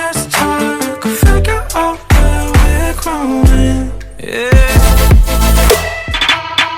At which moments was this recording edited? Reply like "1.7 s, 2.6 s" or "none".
4.8 s